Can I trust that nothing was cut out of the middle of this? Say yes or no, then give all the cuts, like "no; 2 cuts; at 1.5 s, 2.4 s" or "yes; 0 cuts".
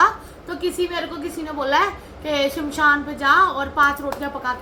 yes; 0 cuts